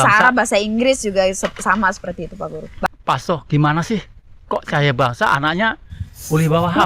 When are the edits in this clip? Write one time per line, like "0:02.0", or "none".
0:02.9